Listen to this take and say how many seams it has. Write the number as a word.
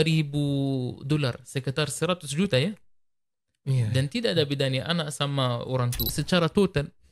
one